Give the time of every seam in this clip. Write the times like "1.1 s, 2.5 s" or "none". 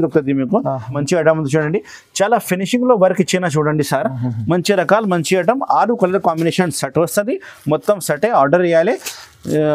0.9 s